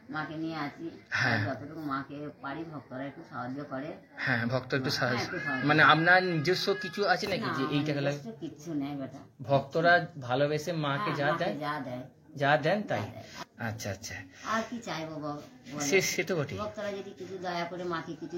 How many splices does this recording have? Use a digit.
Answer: 1